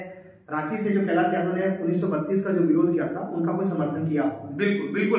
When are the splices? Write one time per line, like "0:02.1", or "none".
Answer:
none